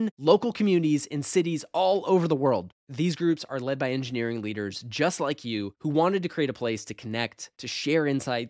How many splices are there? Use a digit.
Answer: 0